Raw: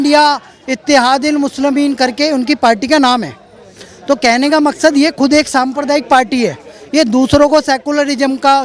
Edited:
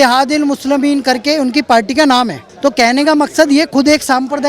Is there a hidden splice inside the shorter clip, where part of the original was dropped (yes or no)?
yes